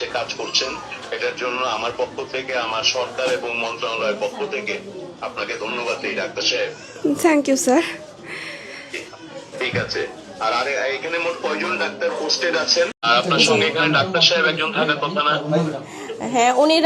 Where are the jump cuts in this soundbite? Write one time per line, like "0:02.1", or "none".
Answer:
0:13.1